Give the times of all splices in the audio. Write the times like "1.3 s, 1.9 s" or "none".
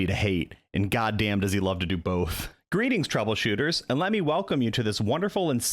2.5 s